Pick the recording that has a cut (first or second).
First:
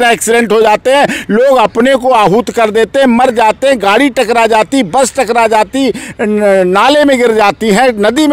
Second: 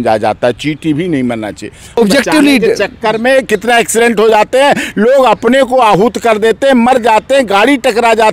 second